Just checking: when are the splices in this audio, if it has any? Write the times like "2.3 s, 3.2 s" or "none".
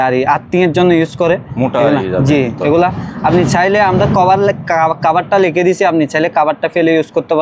none